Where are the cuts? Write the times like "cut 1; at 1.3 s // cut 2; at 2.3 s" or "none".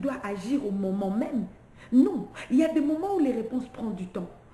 none

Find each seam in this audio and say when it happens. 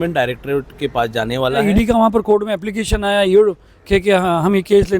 cut 1; at 1.6 s

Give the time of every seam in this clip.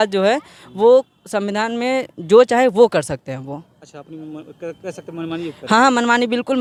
none

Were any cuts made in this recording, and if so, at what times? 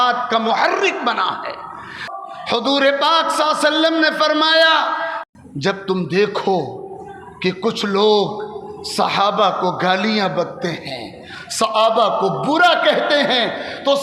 cut 1; at 2.0 s // cut 2; at 5.1 s

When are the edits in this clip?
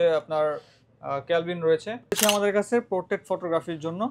cut 1; at 2.2 s

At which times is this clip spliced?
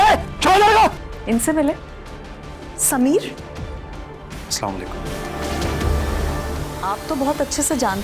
cut 1; at 1.1 s // cut 2; at 5.1 s // cut 3; at 6.7 s

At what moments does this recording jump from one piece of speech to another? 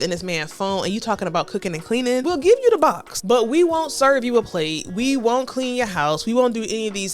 cut 1; at 2.2 s // cut 2; at 3.1 s

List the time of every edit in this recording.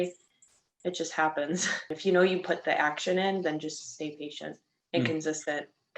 cut 1; at 1.9 s

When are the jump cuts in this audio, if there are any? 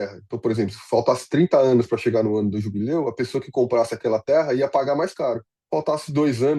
cut 1; at 5.5 s

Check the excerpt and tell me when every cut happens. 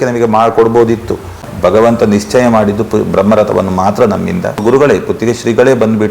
cut 1; at 1.4 s // cut 2; at 4.6 s

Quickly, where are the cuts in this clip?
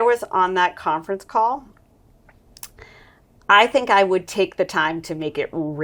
none

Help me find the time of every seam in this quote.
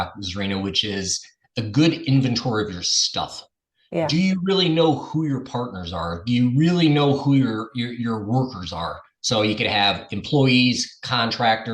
none

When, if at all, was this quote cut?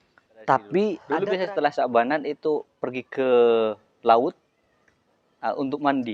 cut 1; at 1.1 s

